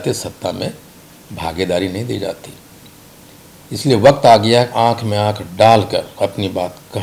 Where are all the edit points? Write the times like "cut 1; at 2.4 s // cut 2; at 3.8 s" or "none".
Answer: none